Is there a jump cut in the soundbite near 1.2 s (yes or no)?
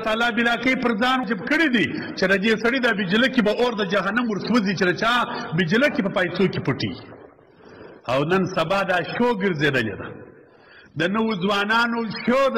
yes